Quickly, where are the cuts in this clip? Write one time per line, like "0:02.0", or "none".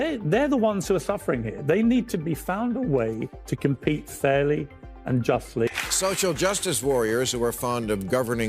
0:05.6